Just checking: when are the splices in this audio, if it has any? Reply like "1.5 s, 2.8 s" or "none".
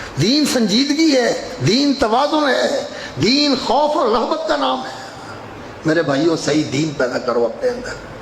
1.3 s